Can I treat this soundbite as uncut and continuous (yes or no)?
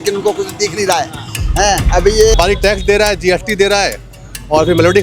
no